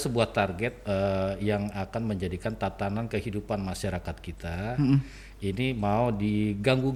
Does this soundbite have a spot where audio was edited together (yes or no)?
no